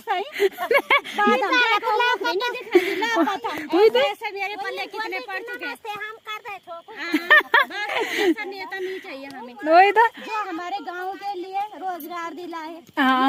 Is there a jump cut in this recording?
no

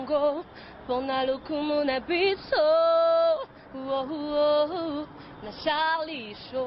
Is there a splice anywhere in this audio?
no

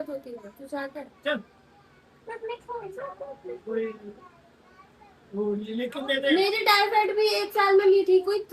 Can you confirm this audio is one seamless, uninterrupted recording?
yes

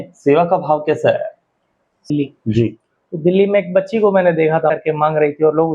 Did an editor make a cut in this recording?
yes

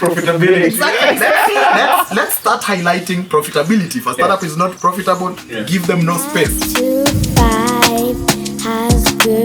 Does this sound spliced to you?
yes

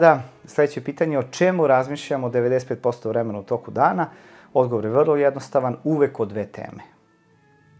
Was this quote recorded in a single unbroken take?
yes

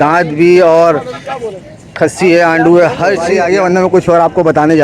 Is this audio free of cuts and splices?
no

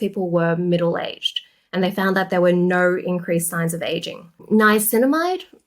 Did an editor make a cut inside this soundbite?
yes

